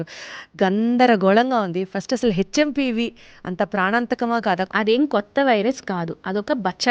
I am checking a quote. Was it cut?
yes; 1 cut; at 4.7 s

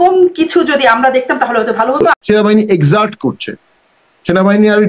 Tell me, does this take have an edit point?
yes; 1 cut; at 2.2 s

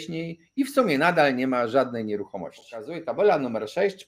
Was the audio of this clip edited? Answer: yes; 1 cut; at 3.0 s

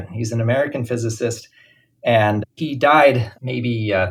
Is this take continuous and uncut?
yes; 0 cuts

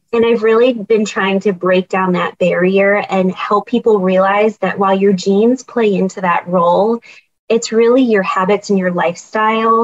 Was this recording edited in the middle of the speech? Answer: no; 0 cuts

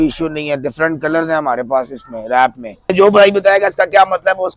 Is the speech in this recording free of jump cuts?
no; 1 cut; at 2.9 s

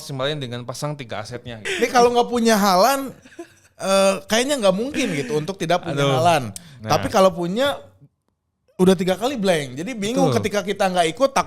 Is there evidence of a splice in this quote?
yes; 1 cut; at 1.6 s

